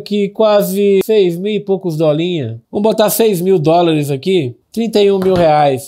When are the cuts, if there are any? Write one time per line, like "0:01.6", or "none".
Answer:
0:01.0